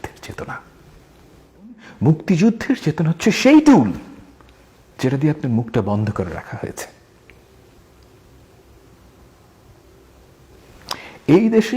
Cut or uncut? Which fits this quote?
cut